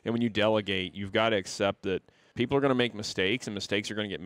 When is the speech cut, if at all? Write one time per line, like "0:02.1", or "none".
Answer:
0:02.2